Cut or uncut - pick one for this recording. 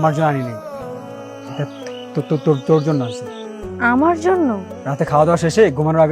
cut